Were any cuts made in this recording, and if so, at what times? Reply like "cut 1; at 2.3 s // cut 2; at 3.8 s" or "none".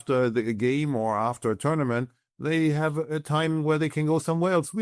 none